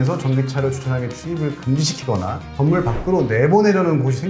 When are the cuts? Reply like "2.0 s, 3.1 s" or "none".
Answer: none

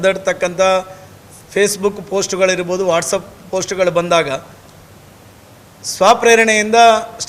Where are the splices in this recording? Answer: none

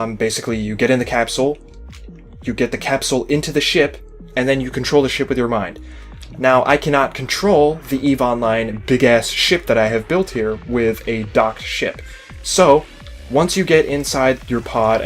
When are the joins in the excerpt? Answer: 1.5 s

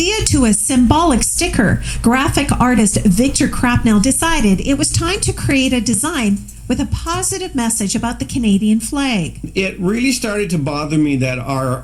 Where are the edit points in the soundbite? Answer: 9.4 s

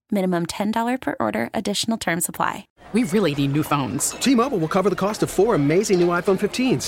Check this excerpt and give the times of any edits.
2.7 s

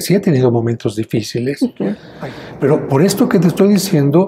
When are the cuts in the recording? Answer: 2.1 s

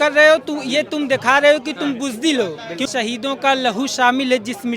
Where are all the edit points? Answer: 2.8 s

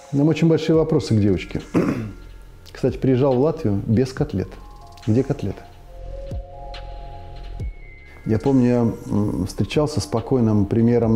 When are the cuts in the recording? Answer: none

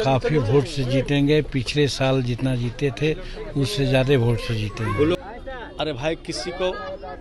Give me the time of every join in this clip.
5.2 s

